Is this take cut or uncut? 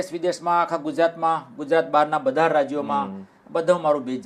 uncut